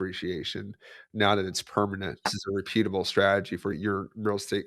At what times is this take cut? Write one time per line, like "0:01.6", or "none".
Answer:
0:02.4
0:03.7